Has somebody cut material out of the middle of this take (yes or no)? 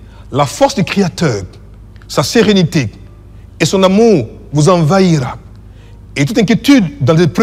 no